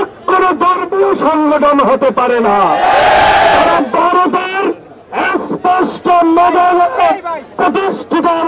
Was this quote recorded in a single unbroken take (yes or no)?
yes